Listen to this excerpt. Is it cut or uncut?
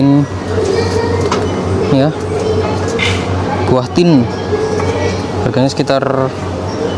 uncut